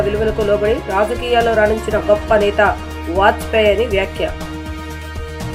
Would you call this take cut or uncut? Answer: uncut